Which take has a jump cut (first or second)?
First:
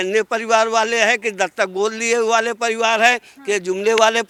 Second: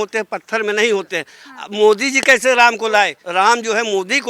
second